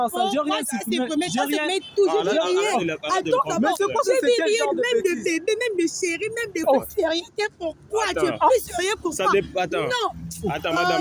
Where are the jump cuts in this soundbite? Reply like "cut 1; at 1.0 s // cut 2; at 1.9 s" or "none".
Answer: cut 1; at 6.6 s